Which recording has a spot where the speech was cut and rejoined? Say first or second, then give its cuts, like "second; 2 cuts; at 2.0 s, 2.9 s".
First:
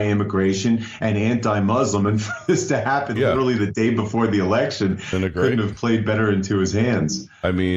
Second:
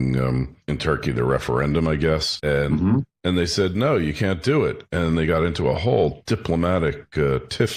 second; 1 cut; at 4.0 s